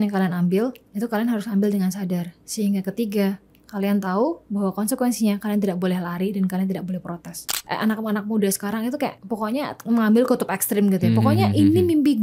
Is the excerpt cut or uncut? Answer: cut